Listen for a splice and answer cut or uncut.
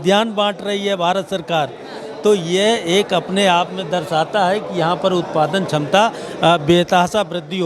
uncut